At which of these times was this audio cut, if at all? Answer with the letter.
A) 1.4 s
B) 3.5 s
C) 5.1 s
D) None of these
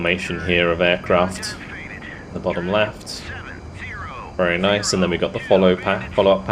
D